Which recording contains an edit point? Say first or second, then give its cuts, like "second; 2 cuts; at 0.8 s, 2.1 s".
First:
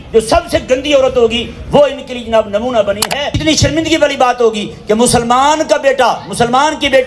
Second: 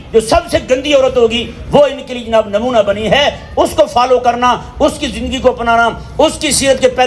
first; 1 cut; at 3.2 s